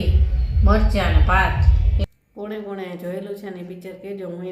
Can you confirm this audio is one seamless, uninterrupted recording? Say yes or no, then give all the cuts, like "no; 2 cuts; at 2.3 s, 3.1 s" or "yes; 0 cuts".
no; 1 cut; at 1.9 s